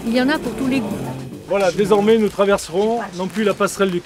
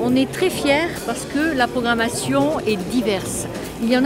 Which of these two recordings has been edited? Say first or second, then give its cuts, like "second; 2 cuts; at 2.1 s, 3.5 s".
first; 1 cut; at 1.3 s